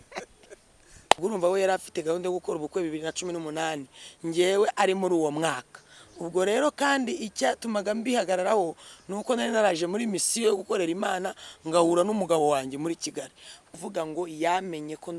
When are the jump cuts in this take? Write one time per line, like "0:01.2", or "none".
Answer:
0:01.2
0:13.7